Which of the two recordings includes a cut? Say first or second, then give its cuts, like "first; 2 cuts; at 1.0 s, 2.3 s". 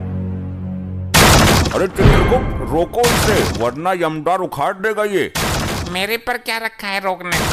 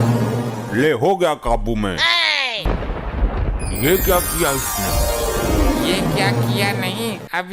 second; 1 cut; at 2.7 s